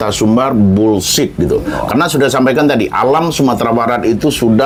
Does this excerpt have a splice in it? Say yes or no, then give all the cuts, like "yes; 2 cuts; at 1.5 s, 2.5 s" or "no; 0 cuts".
no; 0 cuts